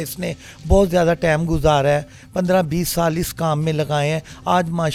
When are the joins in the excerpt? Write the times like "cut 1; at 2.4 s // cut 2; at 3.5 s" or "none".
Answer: none